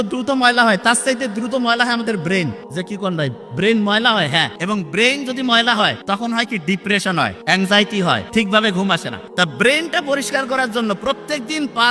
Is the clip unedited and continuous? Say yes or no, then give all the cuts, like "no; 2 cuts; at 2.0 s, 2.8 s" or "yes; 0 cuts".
no; 6 cuts; at 2.6 s, 4.5 s, 6.0 s, 7.4 s, 8.2 s, 9.2 s